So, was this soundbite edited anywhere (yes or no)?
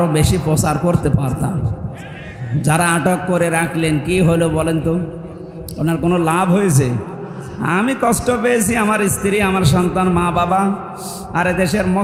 no